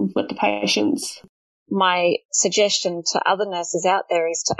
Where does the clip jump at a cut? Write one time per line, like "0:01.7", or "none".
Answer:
0:01.2
0:02.3